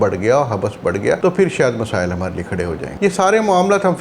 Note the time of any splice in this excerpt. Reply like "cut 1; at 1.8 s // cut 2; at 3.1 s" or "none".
cut 1; at 1.2 s // cut 2; at 2.9 s